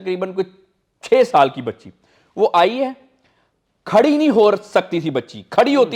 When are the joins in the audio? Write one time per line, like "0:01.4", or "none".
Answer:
none